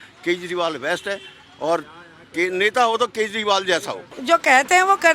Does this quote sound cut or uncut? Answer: cut